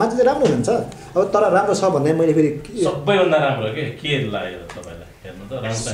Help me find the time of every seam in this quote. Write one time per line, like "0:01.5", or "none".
none